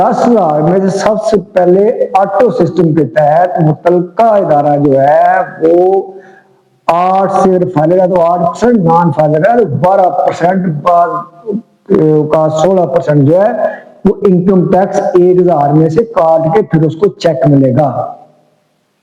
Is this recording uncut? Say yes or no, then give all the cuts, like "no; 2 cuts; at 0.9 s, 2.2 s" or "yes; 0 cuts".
yes; 0 cuts